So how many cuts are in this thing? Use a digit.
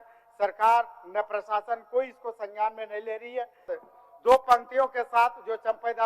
1